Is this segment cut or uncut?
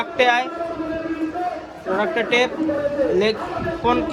uncut